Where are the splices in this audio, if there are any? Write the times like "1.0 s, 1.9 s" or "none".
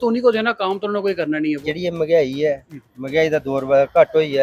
1.6 s

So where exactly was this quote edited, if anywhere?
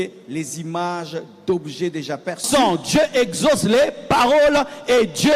2.7 s

